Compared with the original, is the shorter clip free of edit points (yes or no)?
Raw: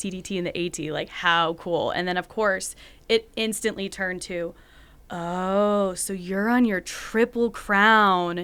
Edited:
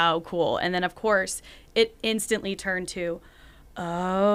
yes